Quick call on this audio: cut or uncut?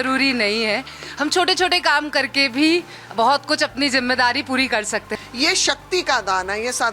cut